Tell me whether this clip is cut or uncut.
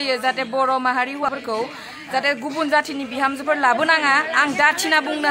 cut